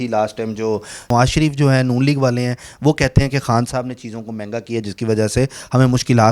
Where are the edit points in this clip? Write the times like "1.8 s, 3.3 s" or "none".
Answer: 1.1 s